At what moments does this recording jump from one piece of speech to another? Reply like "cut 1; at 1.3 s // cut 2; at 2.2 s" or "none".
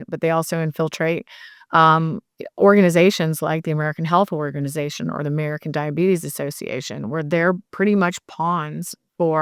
none